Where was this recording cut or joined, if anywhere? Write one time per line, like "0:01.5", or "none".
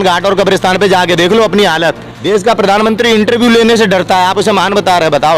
0:02.1